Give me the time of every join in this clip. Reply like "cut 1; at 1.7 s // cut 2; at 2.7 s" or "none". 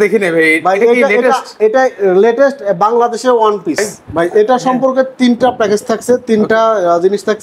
cut 1; at 4.0 s